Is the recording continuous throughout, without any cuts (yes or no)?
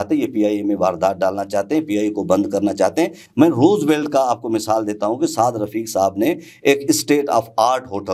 yes